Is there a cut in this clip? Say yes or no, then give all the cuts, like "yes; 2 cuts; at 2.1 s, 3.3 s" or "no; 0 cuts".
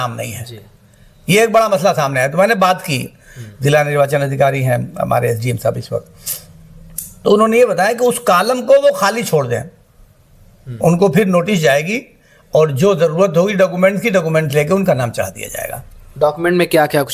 no; 0 cuts